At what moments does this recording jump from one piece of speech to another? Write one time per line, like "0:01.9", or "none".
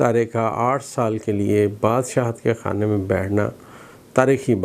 none